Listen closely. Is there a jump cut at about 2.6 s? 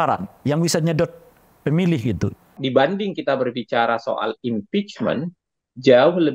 yes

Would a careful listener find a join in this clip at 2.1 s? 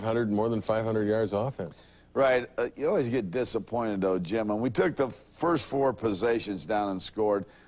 no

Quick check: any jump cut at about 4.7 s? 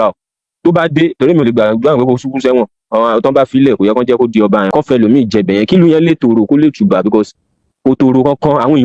yes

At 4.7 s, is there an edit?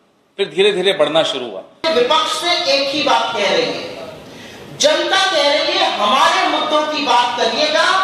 no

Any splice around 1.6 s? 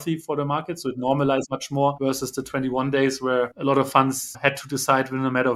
yes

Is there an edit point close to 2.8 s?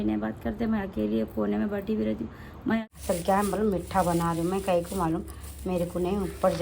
yes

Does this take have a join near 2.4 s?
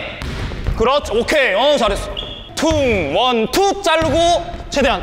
yes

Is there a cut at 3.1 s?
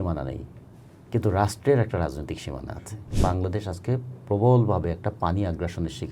yes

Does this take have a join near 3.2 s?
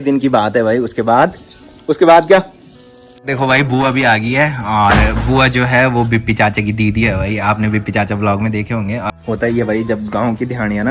yes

